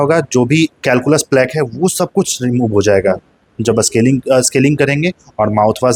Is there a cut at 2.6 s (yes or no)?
no